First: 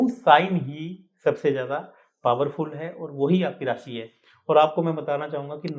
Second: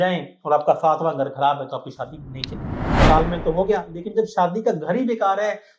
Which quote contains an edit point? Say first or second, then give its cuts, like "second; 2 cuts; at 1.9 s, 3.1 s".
second; 1 cut; at 2.9 s